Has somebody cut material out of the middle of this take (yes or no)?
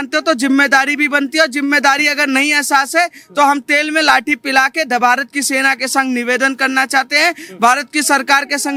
no